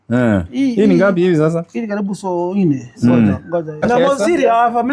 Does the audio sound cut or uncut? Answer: cut